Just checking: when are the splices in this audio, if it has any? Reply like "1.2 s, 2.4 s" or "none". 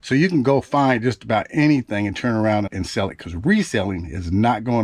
2.7 s